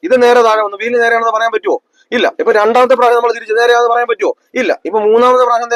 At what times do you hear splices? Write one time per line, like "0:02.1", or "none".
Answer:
none